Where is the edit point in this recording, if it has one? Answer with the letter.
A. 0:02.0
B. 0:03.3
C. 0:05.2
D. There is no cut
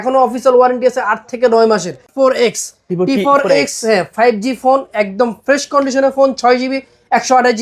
A